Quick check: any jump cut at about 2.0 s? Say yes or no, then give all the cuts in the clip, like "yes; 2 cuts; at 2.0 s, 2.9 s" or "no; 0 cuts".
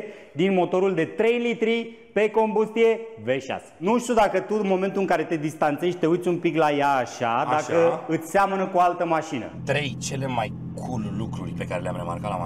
no; 3 cuts; at 3.8 s, 9.4 s, 11.5 s